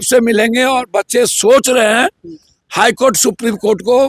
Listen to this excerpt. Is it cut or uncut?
uncut